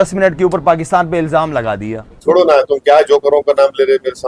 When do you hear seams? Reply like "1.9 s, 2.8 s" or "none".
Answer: 2.2 s